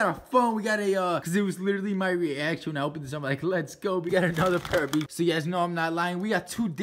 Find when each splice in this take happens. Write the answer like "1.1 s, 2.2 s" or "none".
1.2 s, 4.1 s